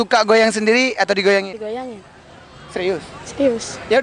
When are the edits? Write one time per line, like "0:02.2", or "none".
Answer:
none